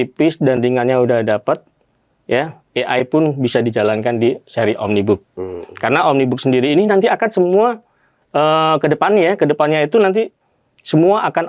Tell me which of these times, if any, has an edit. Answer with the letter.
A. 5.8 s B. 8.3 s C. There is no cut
C